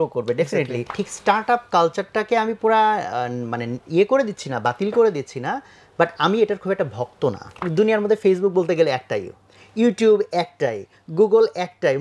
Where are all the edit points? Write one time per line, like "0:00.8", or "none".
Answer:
0:01.0
0:07.5